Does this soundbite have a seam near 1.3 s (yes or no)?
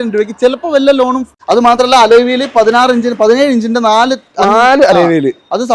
yes